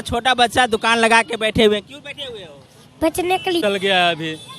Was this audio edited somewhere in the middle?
yes; 1 cut; at 3.6 s

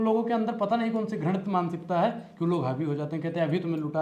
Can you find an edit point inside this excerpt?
no; 0 cuts

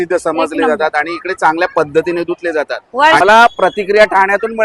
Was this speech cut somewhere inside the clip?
yes; 1 cut; at 3.2 s

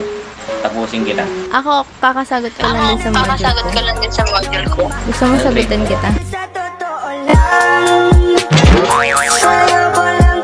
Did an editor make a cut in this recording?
no; 0 cuts

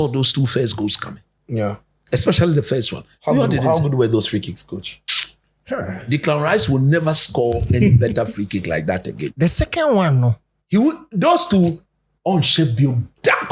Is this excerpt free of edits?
yes; 0 cuts

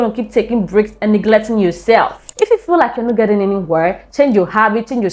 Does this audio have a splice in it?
yes; 1 cut; at 2.2 s

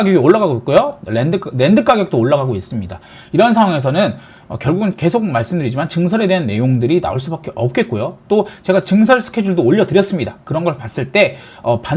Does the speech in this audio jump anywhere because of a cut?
no; 0 cuts

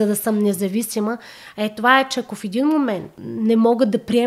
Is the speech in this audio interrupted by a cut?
yes; 1 cut; at 3.1 s

